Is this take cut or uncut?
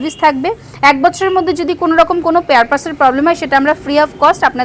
uncut